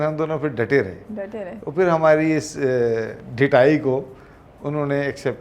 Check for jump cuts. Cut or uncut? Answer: uncut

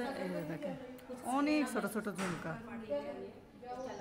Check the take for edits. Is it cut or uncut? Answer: uncut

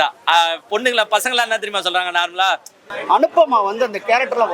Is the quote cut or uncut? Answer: cut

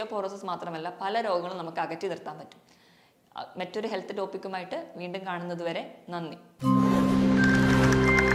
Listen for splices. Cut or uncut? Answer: uncut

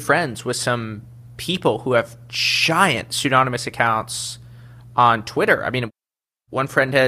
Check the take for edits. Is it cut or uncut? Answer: cut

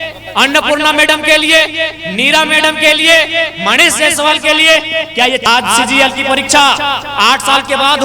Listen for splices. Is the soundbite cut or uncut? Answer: cut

